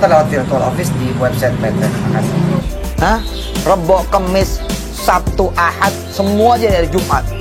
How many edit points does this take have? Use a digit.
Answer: 1